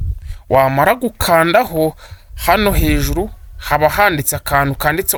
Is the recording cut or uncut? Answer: uncut